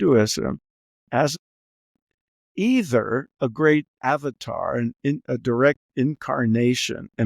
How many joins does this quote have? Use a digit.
1